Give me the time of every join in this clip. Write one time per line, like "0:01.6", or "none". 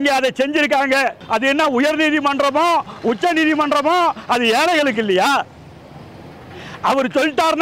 0:01.2